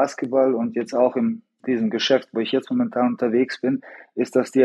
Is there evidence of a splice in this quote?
no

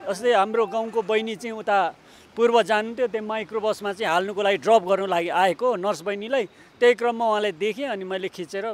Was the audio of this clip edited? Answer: no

